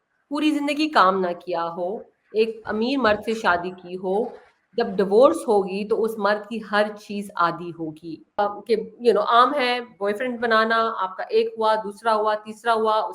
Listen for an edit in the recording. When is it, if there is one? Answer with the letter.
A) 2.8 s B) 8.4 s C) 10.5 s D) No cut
B